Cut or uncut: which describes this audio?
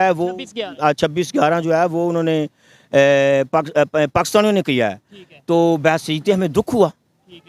uncut